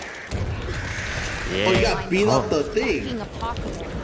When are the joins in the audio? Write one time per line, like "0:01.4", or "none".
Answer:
0:01.6